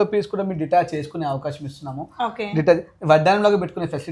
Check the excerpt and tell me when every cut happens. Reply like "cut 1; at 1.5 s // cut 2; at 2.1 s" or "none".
none